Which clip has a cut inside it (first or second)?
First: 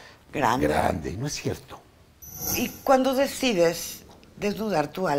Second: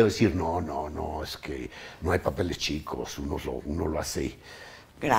first